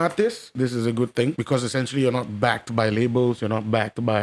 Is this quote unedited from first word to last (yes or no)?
yes